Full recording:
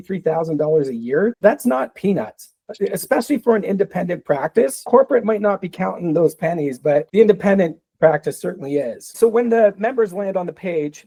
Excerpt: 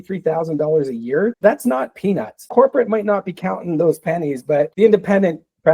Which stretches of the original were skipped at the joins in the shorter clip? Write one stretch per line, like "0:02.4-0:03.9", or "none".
0:02.4-0:04.8